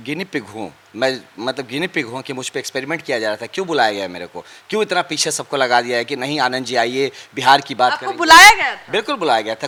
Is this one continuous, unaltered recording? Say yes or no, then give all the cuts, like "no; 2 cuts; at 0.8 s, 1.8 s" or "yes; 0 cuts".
yes; 0 cuts